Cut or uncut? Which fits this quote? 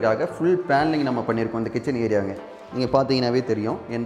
uncut